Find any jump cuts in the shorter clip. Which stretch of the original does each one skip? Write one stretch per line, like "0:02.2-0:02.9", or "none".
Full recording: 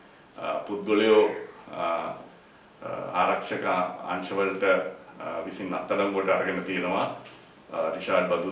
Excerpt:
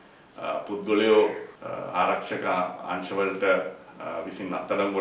0:01.5-0:02.7